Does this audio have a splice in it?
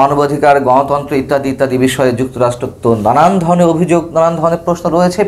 no; 0 cuts

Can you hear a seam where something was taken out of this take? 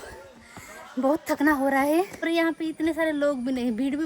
yes; 1 cut; at 2.3 s

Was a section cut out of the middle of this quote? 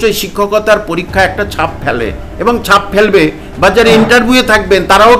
no; 0 cuts

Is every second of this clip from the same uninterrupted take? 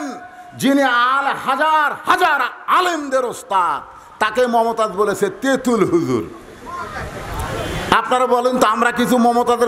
yes; 0 cuts

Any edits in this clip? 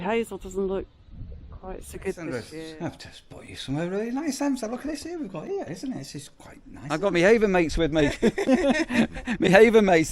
yes; 2 cuts; at 2.6 s, 6.9 s

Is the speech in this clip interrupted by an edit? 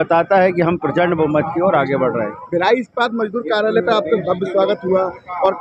no; 0 cuts

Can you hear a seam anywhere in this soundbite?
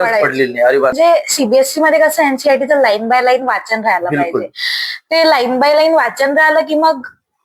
yes; 1 cut; at 0.9 s

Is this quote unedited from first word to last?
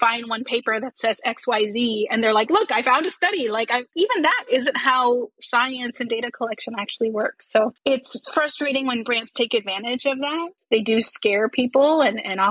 no; 3 cuts; at 3.9 s, 7.8 s, 10.6 s

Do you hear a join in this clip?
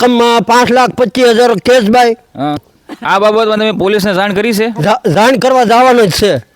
yes; 1 cut; at 2.6 s

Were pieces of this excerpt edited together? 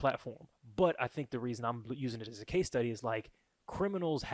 no; 0 cuts

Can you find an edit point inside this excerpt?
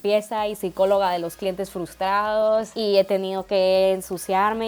yes; 1 cut; at 2.7 s

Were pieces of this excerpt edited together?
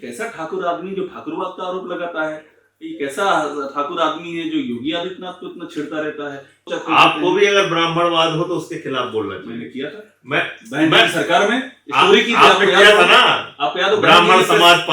yes; 1 cut; at 6.7 s

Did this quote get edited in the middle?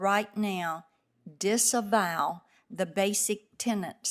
no; 0 cuts

